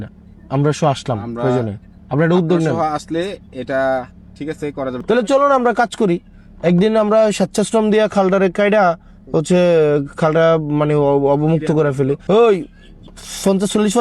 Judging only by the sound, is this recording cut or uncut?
cut